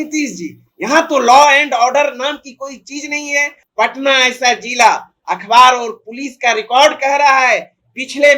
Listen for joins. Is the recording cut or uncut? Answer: cut